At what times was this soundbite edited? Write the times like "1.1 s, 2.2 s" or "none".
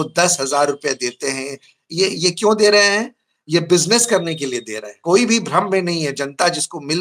4.9 s